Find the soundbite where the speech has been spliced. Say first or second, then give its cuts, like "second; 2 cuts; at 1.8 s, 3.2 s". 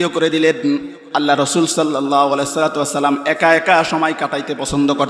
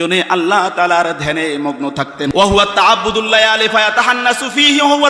second; 1 cut; at 2.3 s